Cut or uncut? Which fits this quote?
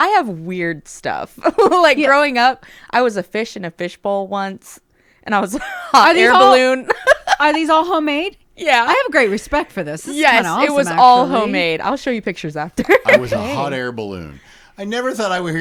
uncut